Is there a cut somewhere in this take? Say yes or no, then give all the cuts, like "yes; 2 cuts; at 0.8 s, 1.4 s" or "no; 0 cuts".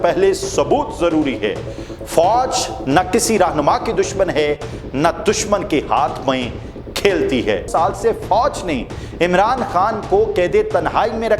yes; 1 cut; at 7.7 s